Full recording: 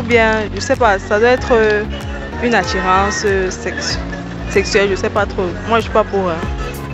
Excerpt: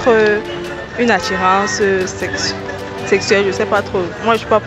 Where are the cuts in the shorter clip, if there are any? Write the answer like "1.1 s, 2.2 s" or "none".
none